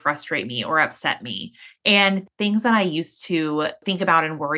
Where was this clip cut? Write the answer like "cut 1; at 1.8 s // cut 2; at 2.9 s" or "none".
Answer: cut 1; at 2.2 s // cut 2; at 3.8 s